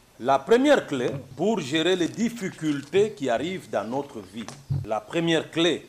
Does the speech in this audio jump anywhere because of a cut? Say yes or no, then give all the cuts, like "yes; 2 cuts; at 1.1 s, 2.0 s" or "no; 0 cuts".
yes; 2 cuts; at 1.2 s, 4.8 s